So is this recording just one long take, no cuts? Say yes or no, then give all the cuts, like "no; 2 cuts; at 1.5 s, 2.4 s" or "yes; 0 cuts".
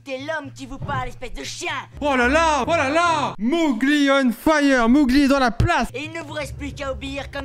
no; 2 cuts; at 3.4 s, 5.9 s